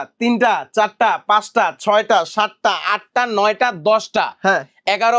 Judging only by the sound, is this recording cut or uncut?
uncut